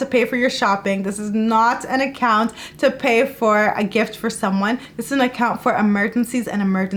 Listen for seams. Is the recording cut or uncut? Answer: uncut